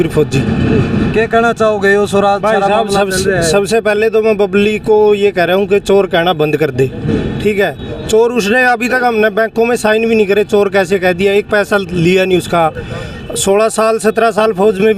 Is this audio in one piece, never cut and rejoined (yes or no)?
yes